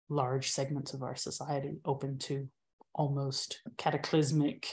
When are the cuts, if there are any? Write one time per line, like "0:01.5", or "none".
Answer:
0:03.6

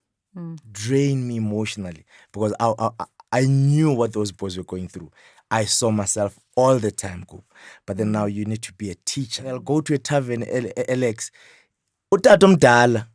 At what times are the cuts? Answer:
0:09.6

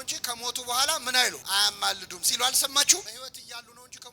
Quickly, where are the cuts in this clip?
0:01.4
0:03.1

